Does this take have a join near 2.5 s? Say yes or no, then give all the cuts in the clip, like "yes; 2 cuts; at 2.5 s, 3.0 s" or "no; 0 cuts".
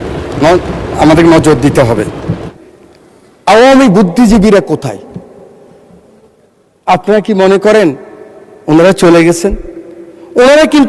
yes; 1 cut; at 2.5 s